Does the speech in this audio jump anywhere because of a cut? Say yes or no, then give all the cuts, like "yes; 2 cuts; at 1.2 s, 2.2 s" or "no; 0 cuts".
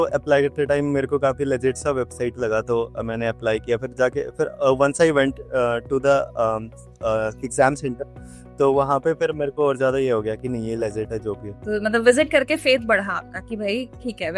yes; 1 cut; at 11.5 s